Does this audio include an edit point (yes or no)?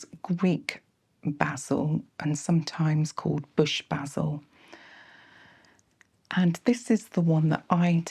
no